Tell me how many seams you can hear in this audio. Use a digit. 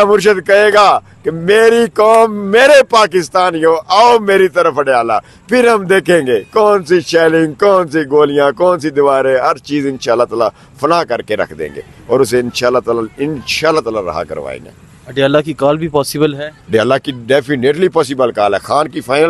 0